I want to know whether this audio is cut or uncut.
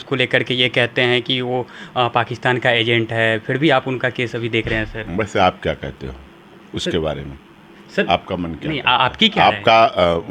uncut